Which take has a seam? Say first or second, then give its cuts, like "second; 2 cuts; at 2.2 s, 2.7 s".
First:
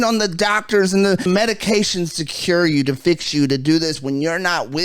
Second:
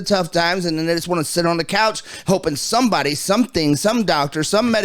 first; 1 cut; at 1.3 s